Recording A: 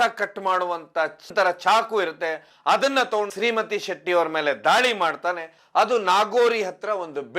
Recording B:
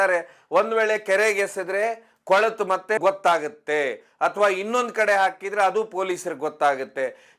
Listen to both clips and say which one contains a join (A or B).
A